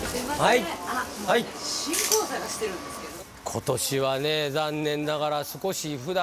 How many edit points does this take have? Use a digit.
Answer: 1